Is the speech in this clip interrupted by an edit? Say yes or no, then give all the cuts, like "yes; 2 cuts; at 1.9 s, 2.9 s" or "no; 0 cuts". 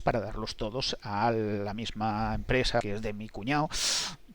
yes; 1 cut; at 2.8 s